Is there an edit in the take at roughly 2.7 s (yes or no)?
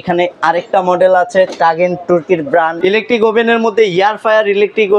yes